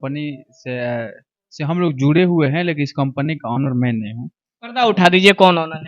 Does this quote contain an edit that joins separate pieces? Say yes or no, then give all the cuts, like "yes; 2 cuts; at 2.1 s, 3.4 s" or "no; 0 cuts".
no; 0 cuts